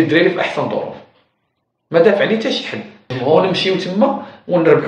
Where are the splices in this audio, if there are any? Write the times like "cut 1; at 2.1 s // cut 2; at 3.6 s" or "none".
cut 1; at 3.1 s